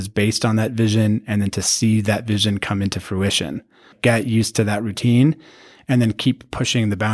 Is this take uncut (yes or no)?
no